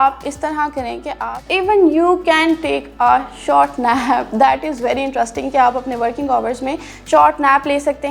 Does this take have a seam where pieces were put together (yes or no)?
yes